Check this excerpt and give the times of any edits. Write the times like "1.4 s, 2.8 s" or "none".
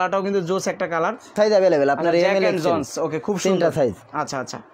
1.6 s

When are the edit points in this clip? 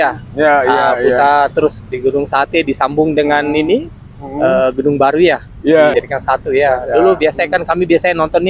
5.9 s

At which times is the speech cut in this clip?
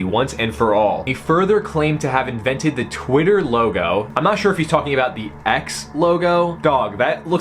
1.0 s, 6.6 s

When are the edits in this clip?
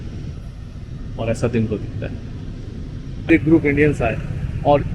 3.3 s

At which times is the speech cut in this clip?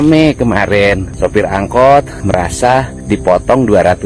1.1 s, 2.5 s

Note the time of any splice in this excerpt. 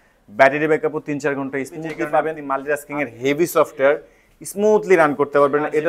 2.5 s

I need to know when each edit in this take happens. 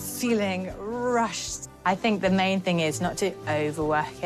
none

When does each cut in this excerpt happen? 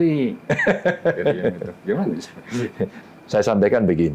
3.0 s

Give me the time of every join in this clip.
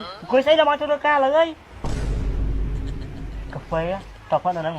1.7 s, 3.4 s

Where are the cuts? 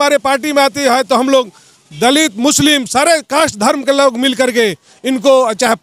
none

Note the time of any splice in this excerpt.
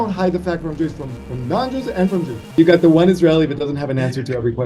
2.6 s

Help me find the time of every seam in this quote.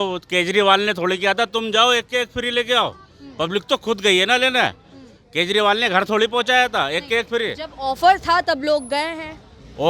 none

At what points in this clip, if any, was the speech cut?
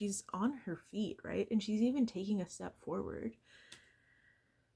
none

